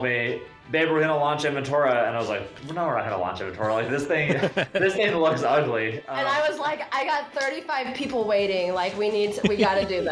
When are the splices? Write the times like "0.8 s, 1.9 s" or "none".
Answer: 2.6 s